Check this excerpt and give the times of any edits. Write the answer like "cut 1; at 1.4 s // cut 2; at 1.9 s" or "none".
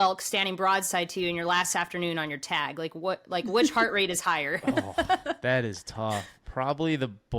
cut 1; at 6.4 s